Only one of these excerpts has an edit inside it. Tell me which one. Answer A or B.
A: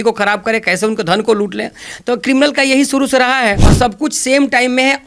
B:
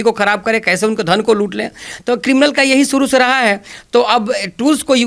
A